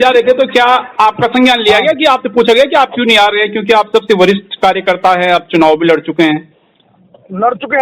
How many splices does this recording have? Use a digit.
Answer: 0